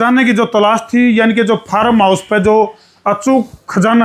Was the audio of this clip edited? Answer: no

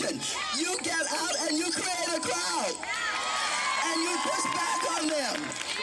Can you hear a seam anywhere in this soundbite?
no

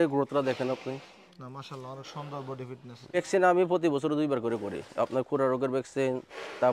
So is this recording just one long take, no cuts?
no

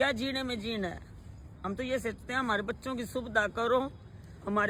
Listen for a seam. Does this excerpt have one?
no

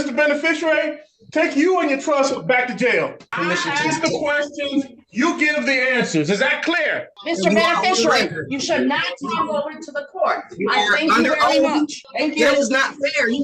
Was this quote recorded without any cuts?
no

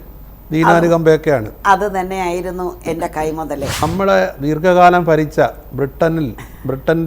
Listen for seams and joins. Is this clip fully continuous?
no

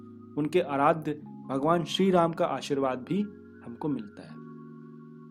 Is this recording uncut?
yes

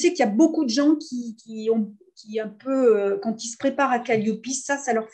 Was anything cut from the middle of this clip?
no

